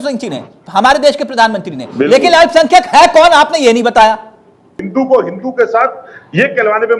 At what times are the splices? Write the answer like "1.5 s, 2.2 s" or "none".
4.8 s

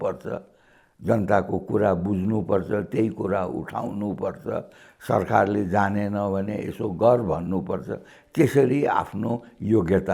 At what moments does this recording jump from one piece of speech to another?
none

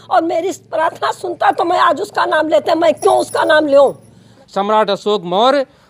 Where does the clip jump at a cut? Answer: 4.4 s

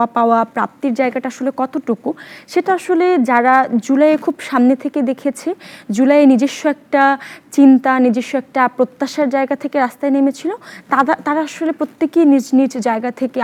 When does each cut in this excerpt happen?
none

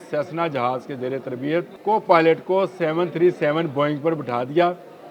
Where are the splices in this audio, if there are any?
1.7 s

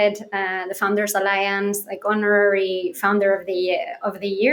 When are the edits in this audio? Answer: none

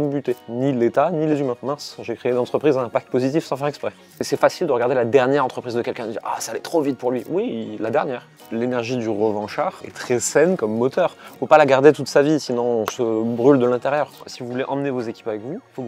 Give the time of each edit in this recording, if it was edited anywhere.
1.6 s, 4.1 s, 8.3 s, 9.9 s, 14.2 s

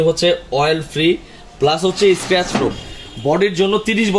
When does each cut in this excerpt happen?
2.8 s

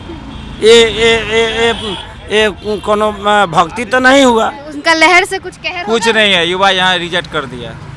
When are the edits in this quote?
4.7 s

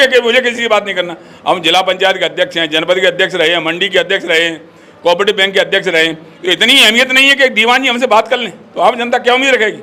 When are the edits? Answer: none

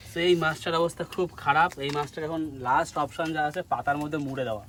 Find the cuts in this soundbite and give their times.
none

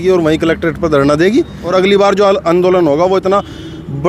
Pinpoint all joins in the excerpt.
1.6 s

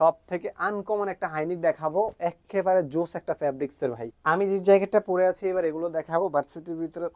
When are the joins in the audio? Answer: 4.1 s

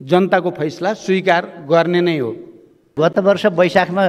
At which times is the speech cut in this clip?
2.9 s

